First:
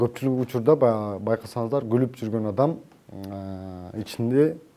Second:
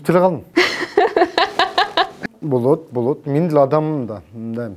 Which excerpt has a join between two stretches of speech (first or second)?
second